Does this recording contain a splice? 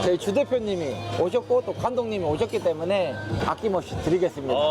yes; 1 cut; at 3.3 s

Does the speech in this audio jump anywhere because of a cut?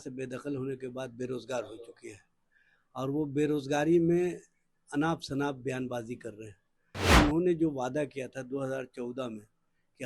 yes; 1 cut; at 7.1 s

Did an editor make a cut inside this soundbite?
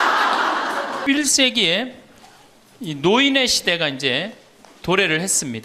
yes; 1 cut; at 1.0 s

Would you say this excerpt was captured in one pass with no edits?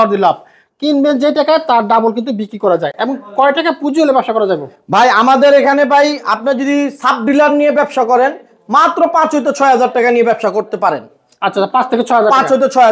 yes; 0 cuts

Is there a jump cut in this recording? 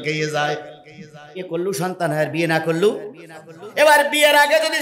yes; 1 cut; at 1.4 s

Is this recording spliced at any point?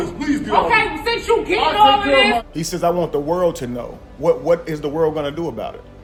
no; 0 cuts

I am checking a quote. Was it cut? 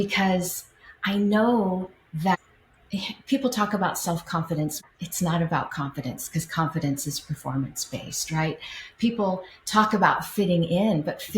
yes; 1 cut; at 4.8 s

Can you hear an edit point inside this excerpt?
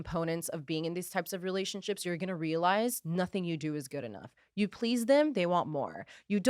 no; 0 cuts

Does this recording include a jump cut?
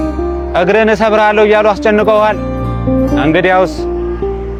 no; 0 cuts

